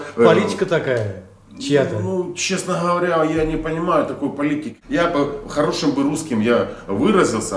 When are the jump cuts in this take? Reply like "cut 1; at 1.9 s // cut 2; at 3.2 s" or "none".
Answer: cut 1; at 4.8 s